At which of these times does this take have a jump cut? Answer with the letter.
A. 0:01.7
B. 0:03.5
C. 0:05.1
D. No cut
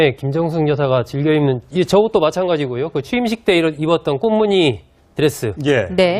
C